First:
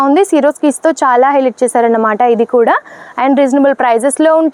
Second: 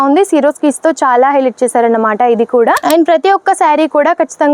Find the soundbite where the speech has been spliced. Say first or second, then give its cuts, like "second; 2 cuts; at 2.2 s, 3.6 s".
second; 1 cut; at 2.8 s